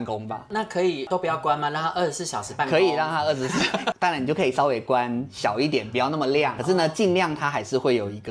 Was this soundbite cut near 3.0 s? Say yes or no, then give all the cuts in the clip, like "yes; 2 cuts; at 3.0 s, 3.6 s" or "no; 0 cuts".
no; 0 cuts